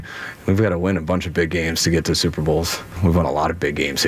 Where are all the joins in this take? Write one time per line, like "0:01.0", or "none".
0:02.9